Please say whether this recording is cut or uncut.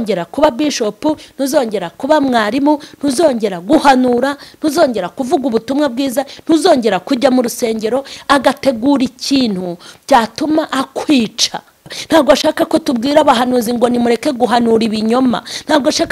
cut